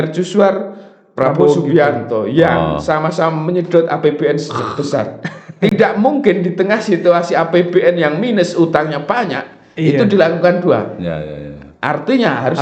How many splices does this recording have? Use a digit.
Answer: 0